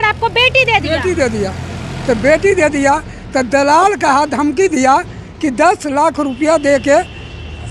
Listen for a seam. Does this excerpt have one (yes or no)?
no